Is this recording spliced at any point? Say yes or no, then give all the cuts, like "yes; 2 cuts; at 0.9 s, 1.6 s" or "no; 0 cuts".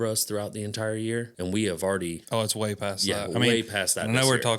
yes; 2 cuts; at 1.3 s, 2.2 s